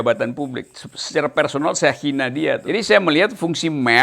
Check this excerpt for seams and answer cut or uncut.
cut